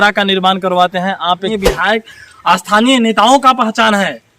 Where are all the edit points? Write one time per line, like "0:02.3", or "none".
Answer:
0:01.5